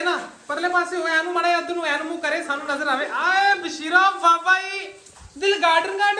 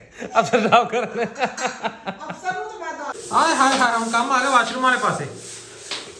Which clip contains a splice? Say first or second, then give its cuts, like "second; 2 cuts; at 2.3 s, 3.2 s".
second; 1 cut; at 3.1 s